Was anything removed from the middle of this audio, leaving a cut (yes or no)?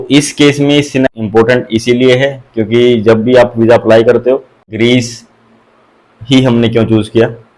yes